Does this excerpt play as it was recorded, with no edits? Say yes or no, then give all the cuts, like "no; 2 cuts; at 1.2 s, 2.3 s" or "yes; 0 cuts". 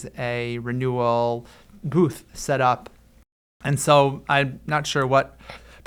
yes; 0 cuts